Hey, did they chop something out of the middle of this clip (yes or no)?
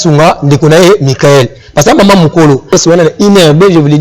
yes